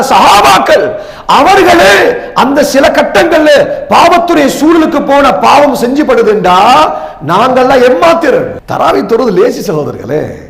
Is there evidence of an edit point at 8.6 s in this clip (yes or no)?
yes